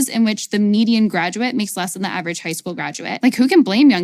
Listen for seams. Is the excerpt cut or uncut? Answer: cut